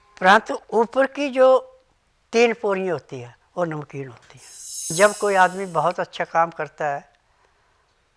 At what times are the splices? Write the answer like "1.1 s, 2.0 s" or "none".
4.9 s